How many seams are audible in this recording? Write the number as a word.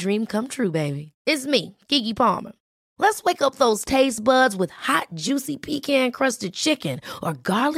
zero